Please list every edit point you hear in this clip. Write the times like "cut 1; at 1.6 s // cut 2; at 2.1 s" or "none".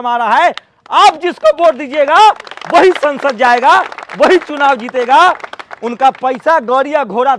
none